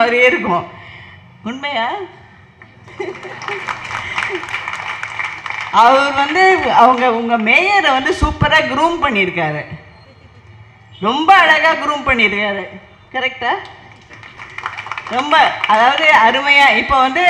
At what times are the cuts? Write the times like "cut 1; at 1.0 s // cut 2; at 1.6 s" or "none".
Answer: none